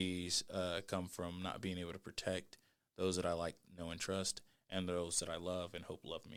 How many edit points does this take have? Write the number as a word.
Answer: zero